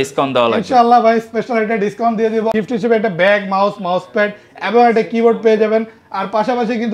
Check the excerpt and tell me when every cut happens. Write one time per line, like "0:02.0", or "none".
0:02.5